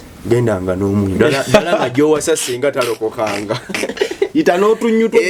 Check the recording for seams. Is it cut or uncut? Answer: uncut